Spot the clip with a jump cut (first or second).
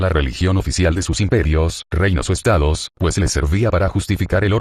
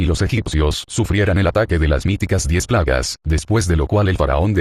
second